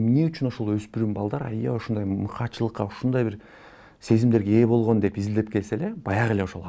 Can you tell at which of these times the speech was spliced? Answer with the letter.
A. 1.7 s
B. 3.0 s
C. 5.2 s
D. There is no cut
D